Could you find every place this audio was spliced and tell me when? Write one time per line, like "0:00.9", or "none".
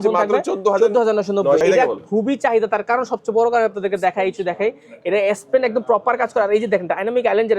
0:01.6